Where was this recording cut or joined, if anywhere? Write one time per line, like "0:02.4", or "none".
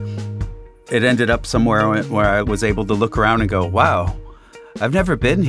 0:02.4